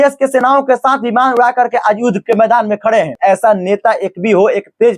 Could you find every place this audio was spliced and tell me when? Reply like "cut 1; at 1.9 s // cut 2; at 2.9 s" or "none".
cut 1; at 3.1 s